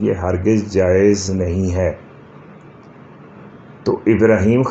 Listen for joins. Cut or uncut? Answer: uncut